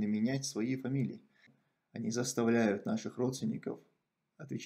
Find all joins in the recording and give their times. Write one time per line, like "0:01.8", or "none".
0:01.6